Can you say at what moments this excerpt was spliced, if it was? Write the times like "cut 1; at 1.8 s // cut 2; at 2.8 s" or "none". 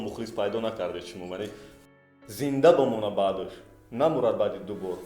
cut 1; at 1.9 s